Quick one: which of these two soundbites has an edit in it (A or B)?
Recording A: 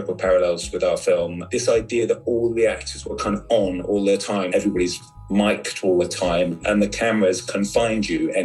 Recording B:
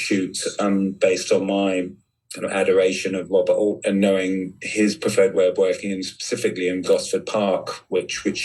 A